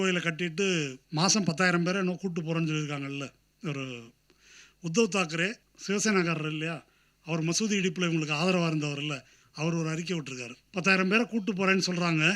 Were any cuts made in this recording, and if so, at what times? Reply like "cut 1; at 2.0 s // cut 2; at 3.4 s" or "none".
cut 1; at 1.0 s // cut 2; at 5.7 s // cut 3; at 10.5 s